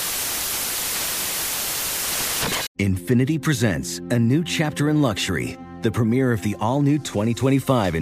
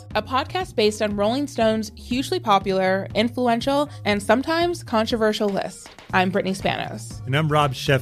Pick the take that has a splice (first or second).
first